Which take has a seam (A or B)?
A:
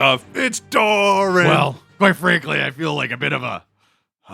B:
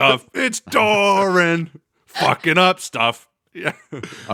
A